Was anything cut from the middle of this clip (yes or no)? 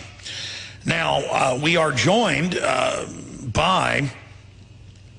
yes